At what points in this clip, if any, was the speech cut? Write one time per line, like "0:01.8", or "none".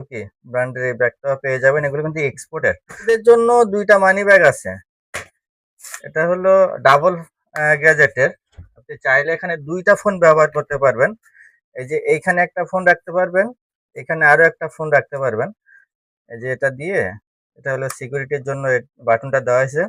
0:03.1